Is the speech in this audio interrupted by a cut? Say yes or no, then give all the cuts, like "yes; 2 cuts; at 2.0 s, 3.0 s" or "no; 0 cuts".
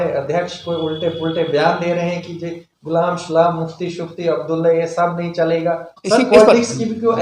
yes; 1 cut; at 5.9 s